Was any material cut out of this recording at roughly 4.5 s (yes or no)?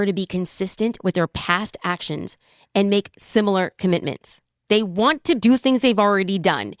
yes